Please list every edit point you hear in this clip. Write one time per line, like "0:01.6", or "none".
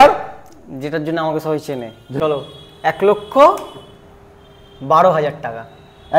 0:02.2